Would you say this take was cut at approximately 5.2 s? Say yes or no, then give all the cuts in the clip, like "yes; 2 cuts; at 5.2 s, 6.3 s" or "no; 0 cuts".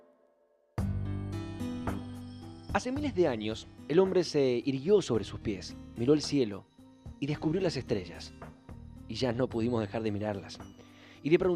yes; 1 cut; at 5.2 s